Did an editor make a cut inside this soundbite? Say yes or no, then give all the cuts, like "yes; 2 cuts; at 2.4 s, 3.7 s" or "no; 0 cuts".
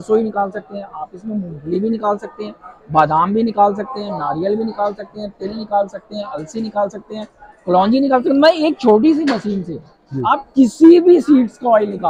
no; 0 cuts